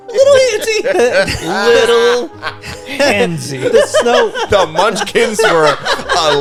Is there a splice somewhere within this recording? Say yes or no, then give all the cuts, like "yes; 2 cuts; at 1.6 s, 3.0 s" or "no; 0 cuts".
no; 0 cuts